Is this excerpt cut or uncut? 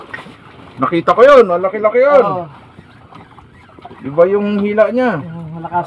uncut